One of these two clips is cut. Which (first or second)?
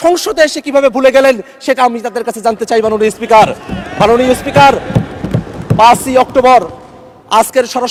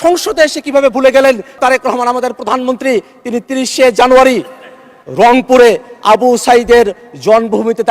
second